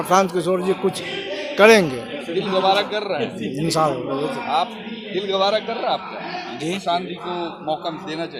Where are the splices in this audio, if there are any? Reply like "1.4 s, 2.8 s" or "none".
none